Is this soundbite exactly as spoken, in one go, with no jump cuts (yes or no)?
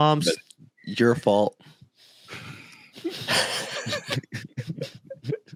yes